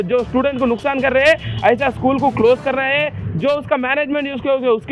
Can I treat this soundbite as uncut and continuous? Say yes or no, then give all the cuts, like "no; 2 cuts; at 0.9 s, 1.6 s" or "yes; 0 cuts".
yes; 0 cuts